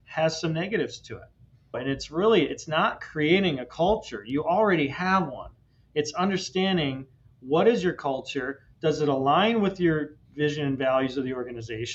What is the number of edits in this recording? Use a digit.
1